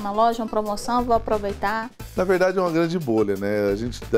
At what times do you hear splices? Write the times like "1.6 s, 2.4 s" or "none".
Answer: 2.0 s